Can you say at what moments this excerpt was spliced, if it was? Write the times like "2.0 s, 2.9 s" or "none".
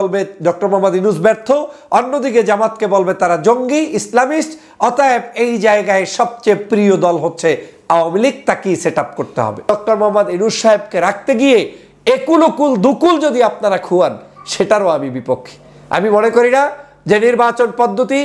9.7 s